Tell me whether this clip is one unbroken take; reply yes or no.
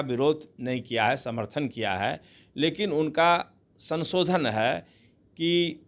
yes